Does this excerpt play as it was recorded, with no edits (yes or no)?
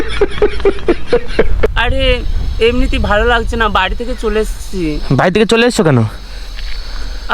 no